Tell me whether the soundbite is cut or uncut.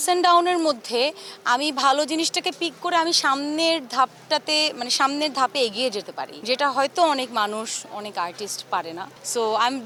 uncut